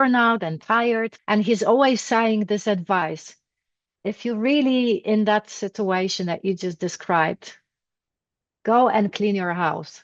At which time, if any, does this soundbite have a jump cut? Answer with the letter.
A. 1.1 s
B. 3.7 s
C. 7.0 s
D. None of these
A